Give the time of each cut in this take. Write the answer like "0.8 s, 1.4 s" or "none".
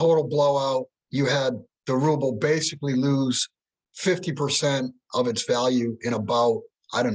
1.0 s